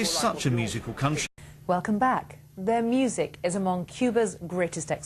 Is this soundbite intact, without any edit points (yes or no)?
yes